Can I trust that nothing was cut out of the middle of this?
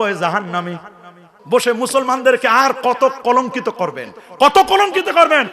no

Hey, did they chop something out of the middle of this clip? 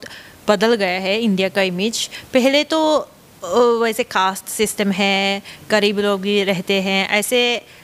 no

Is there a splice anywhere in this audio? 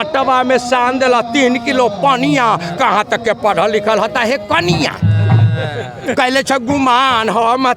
no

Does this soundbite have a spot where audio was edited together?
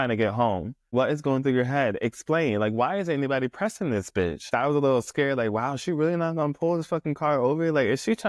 yes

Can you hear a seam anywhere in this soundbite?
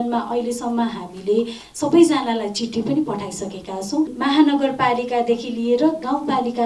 yes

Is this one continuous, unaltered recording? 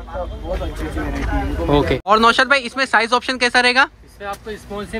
no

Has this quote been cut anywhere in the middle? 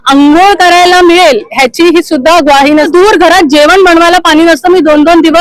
yes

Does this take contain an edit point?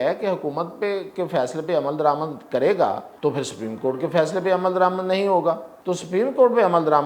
yes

